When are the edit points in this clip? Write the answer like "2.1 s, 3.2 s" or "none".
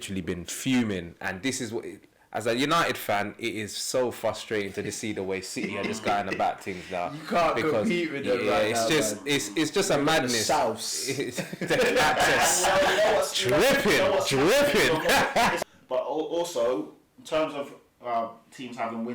15.6 s